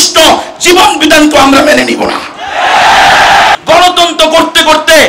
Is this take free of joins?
no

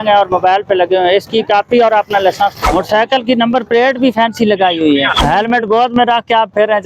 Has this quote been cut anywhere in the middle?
yes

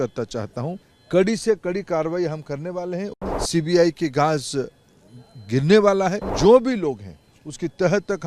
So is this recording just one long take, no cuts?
no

